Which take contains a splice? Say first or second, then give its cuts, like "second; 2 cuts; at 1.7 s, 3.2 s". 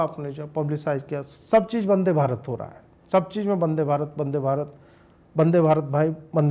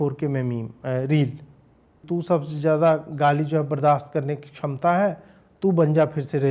second; 1 cut; at 2.0 s